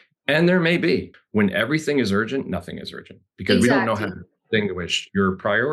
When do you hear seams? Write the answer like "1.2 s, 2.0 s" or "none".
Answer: 1.1 s